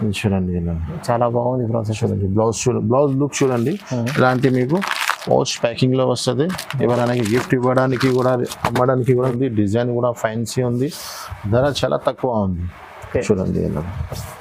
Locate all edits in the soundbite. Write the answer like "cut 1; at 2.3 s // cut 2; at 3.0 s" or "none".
cut 1; at 9.3 s